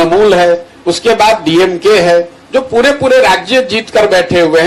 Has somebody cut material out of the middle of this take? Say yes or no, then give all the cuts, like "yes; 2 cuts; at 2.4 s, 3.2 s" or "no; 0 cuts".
no; 0 cuts